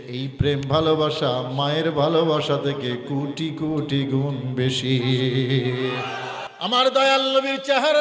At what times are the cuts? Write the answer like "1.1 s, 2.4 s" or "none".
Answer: 6.4 s

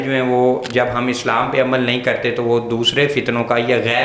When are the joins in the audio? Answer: none

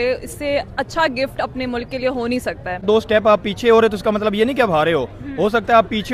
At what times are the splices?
2.8 s

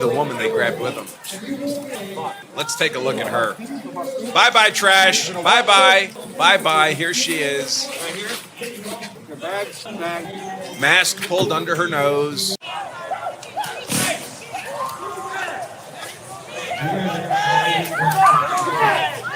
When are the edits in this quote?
12.6 s

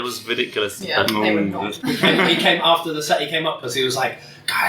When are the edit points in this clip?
1.7 s

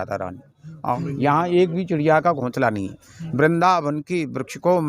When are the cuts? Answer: 0.9 s

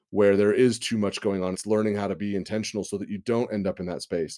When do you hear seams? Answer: 1.6 s

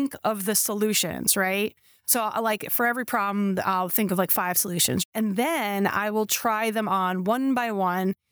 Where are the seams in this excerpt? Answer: 5.1 s

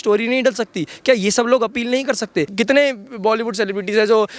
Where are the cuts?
2.5 s

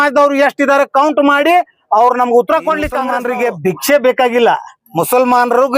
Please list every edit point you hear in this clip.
3.1 s

